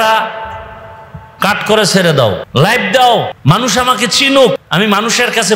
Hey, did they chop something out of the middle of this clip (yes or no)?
yes